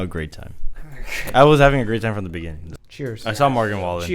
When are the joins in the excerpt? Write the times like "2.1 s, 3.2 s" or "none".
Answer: none